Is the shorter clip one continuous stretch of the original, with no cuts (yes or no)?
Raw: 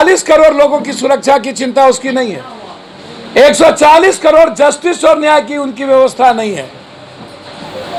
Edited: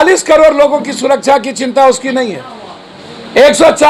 yes